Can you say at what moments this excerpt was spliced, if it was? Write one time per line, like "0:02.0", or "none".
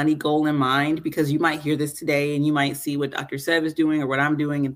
none